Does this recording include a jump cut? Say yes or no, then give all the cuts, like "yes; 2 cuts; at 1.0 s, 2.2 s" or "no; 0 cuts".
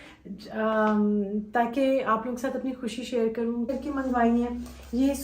yes; 1 cut; at 3.7 s